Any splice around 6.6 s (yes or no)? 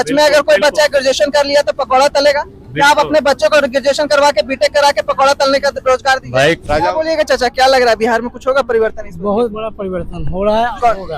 yes